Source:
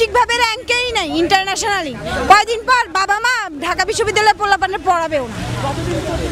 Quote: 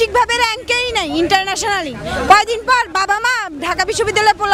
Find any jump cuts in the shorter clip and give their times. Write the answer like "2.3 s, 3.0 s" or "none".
none